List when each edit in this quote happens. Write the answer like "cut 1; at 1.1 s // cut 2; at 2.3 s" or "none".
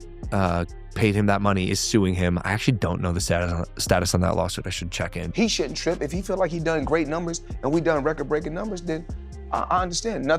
cut 1; at 5.2 s